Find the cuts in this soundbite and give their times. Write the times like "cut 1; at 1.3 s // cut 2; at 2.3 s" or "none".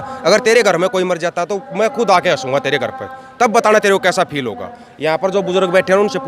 none